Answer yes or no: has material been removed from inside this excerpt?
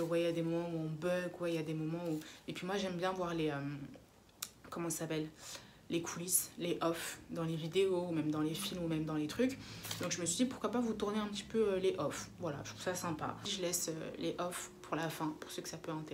yes